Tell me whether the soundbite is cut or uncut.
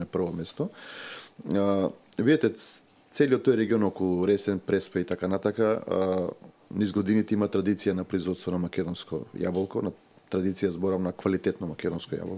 uncut